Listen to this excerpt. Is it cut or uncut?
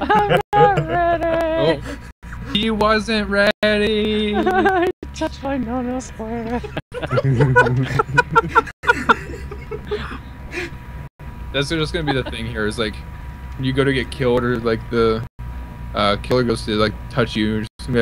cut